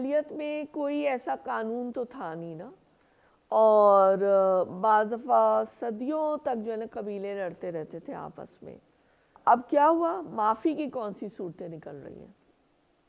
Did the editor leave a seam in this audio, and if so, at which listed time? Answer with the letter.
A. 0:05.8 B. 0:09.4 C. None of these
B